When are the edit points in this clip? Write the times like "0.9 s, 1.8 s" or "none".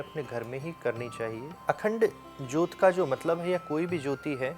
1.5 s